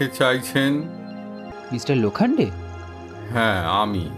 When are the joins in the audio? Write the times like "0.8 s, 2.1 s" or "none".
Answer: 1.6 s